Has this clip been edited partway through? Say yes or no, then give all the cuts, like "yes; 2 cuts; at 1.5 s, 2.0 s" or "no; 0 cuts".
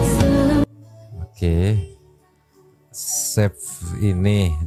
no; 0 cuts